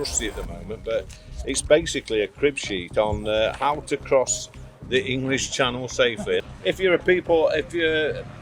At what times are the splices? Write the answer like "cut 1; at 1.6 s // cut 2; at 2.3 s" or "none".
cut 1; at 6.5 s